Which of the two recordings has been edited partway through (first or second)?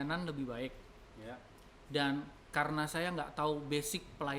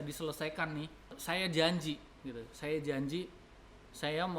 second